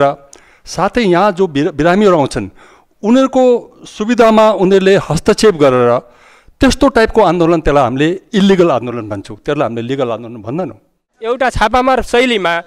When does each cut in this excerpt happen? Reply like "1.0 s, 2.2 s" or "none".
11.1 s